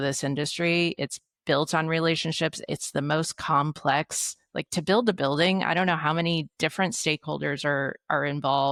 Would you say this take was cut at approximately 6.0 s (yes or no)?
no